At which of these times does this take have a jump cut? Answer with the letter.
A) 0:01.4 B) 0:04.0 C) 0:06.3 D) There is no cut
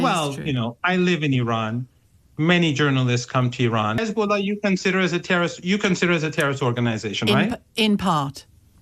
B